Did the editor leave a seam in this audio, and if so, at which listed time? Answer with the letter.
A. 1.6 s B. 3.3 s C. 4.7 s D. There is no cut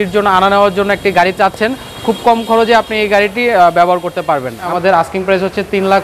C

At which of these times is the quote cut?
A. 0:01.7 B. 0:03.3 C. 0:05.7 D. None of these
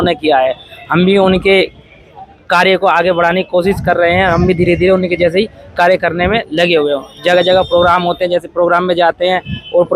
D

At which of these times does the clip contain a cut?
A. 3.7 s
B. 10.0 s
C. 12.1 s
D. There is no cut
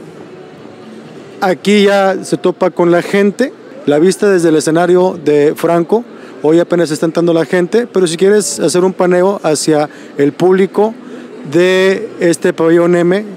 A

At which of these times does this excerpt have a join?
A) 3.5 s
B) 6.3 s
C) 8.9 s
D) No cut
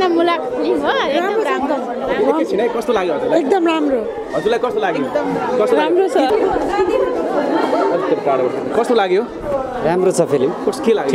B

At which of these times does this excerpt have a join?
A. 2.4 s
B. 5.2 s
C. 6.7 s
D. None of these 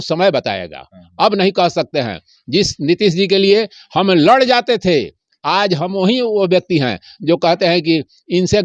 D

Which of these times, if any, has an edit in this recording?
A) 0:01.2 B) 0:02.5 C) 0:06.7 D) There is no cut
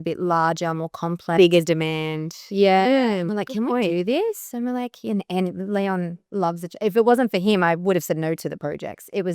D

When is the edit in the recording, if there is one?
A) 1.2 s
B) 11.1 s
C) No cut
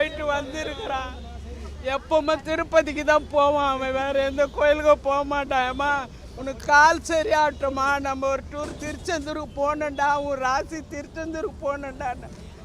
C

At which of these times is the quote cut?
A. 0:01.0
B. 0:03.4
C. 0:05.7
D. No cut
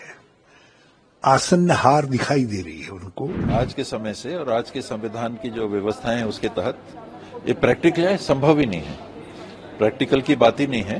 B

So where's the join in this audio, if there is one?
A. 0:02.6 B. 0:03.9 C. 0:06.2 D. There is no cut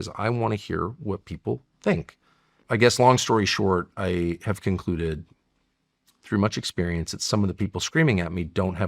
A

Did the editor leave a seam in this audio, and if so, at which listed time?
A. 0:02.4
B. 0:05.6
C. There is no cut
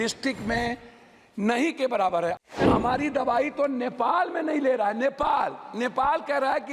A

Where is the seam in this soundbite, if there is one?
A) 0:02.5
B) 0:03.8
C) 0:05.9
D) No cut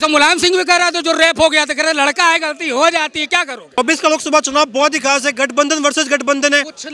B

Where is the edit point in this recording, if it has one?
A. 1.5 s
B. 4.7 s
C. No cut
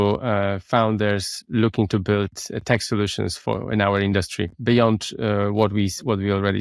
C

